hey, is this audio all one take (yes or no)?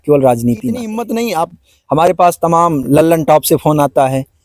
no